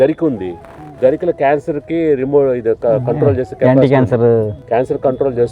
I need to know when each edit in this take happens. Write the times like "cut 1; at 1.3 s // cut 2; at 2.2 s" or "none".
cut 1; at 4.6 s

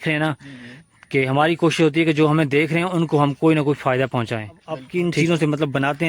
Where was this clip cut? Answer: cut 1; at 4.9 s

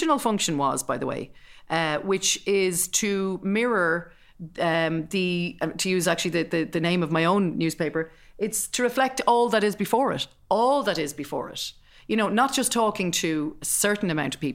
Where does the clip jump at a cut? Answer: none

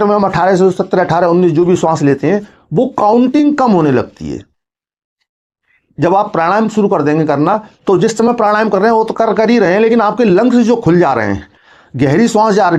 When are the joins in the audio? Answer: none

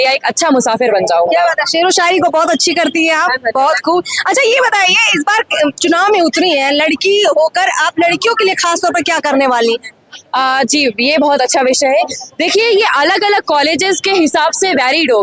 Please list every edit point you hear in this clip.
none

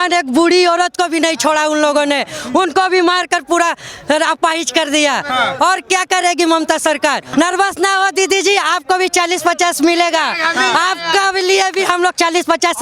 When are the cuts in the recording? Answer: cut 1; at 7.3 s

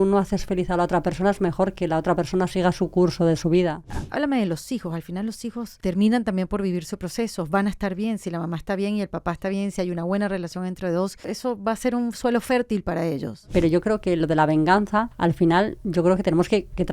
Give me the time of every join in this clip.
cut 1; at 3.9 s // cut 2; at 5.7 s // cut 3; at 11.3 s // cut 4; at 13.3 s // cut 5; at 15.1 s

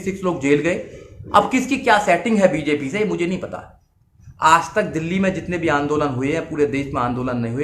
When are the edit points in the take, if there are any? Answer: cut 1; at 4.0 s

